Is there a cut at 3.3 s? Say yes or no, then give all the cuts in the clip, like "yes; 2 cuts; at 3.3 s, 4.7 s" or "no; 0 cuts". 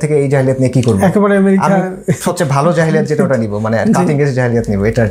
no; 0 cuts